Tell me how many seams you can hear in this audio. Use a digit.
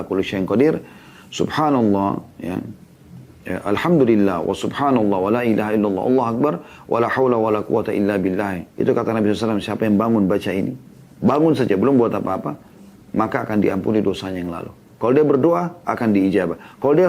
1